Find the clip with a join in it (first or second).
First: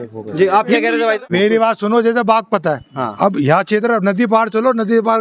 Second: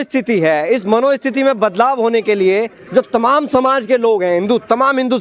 first